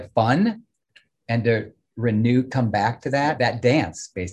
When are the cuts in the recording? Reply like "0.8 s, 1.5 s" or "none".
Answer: 3.4 s